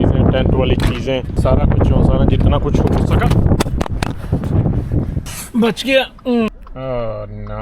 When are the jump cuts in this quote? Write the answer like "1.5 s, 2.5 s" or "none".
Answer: 1.4 s, 5.3 s, 6.5 s